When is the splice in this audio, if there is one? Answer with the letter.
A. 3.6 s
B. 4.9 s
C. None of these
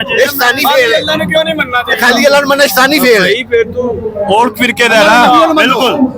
C